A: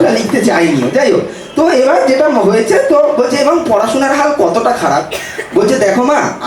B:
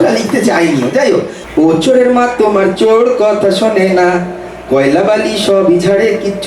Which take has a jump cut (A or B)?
B